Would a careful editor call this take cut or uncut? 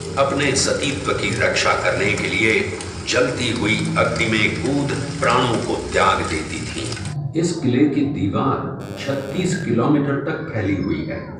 cut